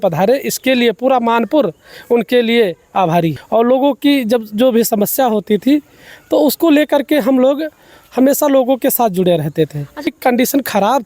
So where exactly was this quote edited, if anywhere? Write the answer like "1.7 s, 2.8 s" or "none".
3.4 s, 10.1 s